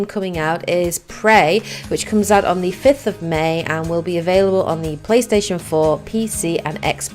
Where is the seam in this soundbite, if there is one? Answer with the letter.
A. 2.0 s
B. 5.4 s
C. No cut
A